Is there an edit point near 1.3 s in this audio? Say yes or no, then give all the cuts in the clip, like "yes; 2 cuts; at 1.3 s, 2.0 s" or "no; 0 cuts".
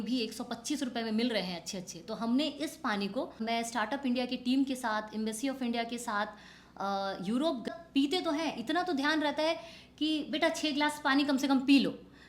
no; 2 cuts; at 3.4 s, 7.7 s